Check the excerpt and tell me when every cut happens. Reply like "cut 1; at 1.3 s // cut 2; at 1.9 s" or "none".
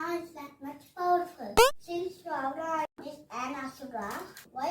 cut 1; at 1.6 s